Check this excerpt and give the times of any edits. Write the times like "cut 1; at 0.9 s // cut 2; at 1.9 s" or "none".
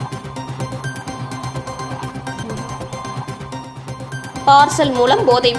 cut 1; at 1.9 s